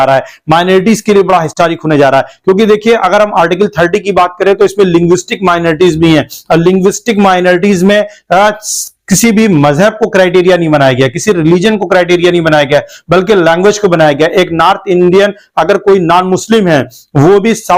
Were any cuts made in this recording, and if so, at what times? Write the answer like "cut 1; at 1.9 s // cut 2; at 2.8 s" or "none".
none